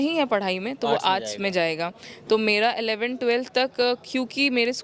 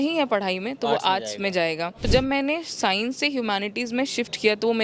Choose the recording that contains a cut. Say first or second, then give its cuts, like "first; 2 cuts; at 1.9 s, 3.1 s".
second; 1 cut; at 2.1 s